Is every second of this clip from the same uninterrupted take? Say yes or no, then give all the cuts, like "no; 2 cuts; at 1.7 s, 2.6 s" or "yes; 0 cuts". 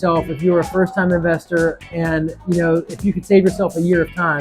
yes; 0 cuts